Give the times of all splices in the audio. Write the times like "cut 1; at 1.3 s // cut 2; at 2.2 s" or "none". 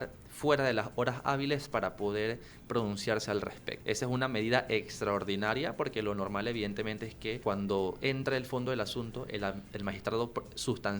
cut 1; at 3.7 s // cut 2; at 7.4 s